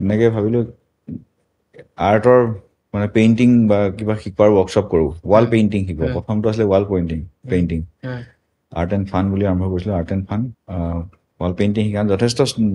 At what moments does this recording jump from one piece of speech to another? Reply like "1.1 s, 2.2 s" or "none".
none